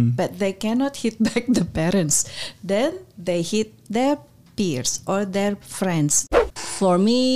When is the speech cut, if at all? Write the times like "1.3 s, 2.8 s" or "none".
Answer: 6.3 s